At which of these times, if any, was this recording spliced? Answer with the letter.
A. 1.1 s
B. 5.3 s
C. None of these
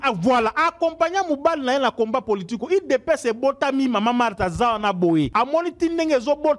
B